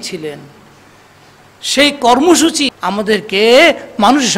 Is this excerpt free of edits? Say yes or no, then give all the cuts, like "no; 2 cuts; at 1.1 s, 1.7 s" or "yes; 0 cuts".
no; 1 cut; at 2.7 s